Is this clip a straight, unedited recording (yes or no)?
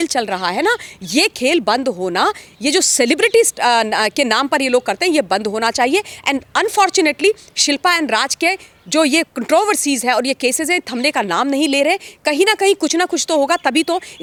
yes